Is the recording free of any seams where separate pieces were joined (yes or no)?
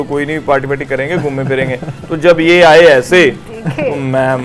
yes